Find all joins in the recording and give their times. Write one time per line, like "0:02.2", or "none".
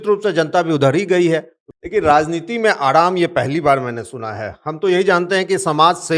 0:01.6